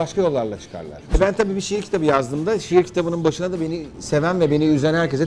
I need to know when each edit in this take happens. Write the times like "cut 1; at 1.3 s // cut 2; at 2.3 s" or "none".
cut 1; at 1.0 s